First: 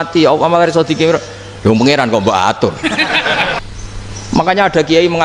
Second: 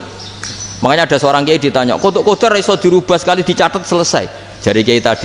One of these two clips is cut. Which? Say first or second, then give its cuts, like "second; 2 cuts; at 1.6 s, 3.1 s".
first; 1 cut; at 3.6 s